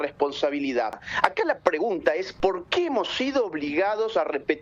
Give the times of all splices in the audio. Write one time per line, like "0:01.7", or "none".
0:00.9